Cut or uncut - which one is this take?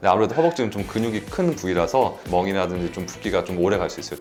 uncut